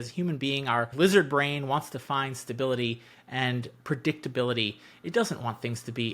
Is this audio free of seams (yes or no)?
yes